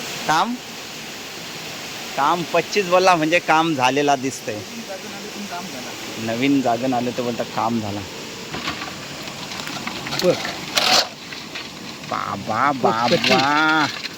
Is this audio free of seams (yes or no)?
yes